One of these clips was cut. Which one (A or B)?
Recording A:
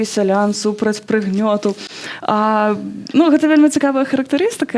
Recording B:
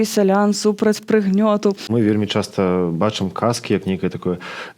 B